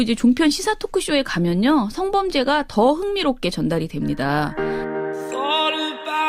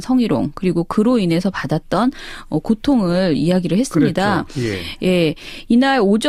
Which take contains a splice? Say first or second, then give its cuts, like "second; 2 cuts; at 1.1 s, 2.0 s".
first; 1 cut; at 4.5 s